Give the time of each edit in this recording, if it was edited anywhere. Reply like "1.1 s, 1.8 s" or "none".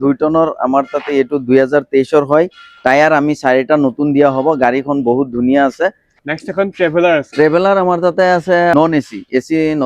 6.1 s, 8.7 s